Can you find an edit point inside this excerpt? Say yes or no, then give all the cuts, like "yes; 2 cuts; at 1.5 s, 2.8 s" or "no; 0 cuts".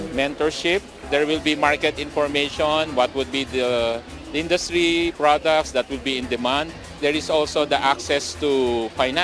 no; 0 cuts